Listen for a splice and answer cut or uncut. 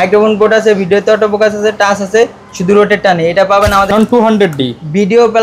cut